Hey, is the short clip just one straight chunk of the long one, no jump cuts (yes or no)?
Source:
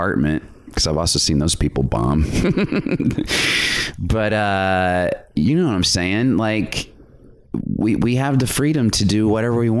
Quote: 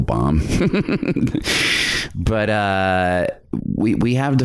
no